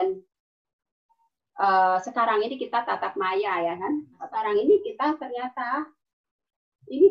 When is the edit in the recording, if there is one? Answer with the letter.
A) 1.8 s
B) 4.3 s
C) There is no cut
B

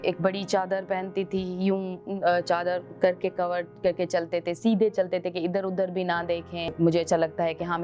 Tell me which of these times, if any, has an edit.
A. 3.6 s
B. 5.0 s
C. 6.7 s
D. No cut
C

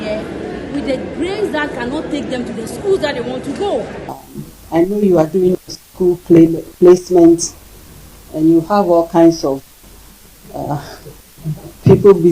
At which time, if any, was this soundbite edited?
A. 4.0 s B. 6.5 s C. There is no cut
A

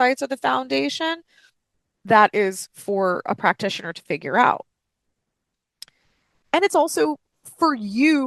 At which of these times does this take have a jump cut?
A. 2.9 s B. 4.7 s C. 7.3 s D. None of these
D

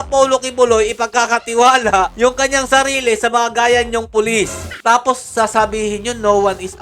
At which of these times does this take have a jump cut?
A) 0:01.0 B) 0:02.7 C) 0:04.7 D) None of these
C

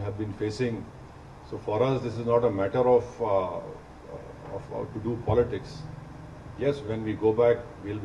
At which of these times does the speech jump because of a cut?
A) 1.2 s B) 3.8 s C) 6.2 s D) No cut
D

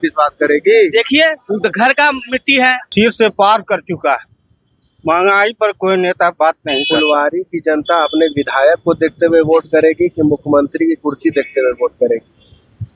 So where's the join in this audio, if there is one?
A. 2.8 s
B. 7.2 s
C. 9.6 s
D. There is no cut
A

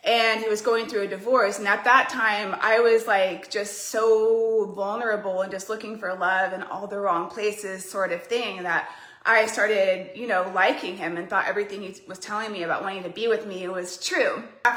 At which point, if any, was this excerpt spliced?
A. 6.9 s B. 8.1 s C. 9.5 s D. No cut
D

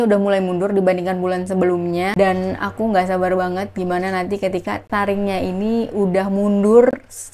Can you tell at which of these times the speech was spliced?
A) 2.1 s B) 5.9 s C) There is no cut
A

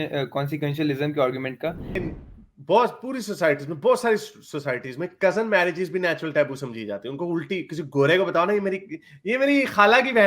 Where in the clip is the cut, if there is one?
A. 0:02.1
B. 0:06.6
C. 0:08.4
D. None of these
A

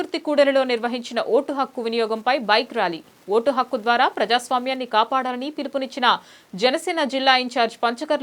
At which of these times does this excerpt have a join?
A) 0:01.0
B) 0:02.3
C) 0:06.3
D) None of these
D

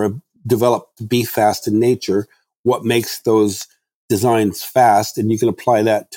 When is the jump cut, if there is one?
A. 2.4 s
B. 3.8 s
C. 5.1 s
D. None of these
D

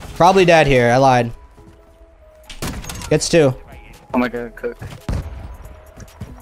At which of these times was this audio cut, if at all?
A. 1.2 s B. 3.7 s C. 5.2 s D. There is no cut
C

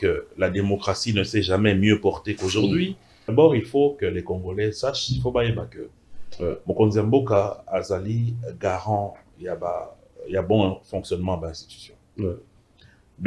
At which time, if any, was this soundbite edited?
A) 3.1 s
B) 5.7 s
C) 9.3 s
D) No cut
A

